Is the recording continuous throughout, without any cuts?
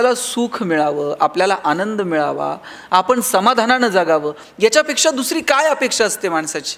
yes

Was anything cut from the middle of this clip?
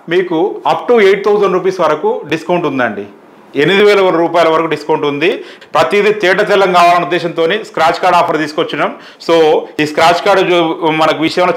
yes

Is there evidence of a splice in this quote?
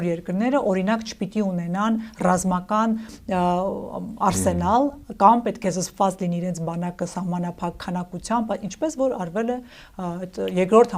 no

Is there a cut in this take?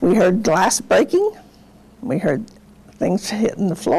yes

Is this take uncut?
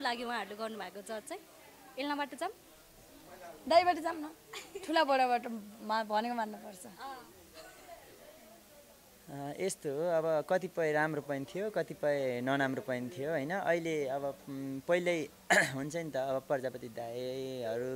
yes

